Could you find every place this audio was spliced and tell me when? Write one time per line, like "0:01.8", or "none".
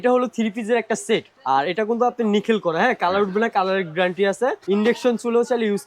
0:01.3
0:04.6